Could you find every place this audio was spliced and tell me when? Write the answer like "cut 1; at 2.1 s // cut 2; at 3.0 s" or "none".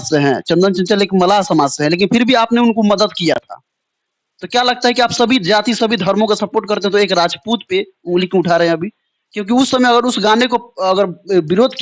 none

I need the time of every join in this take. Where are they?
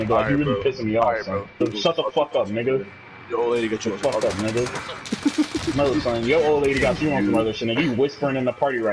cut 1; at 1.6 s

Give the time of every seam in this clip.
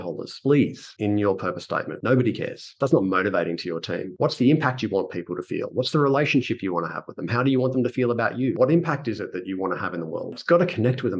cut 1; at 2.7 s // cut 2; at 8.6 s // cut 3; at 10.3 s

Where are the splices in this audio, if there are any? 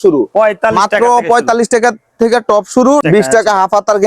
cut 1; at 3.0 s

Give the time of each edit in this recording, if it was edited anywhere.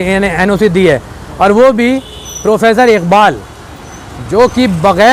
none

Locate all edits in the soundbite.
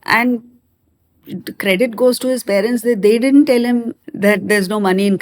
cut 1; at 4.0 s

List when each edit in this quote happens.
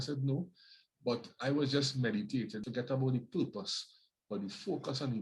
cut 1; at 2.6 s

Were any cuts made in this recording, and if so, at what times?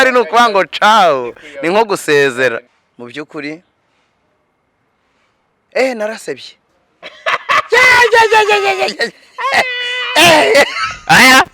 cut 1; at 2.6 s

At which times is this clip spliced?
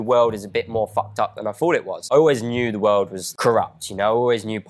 cut 1; at 1.9 s // cut 2; at 3.2 s

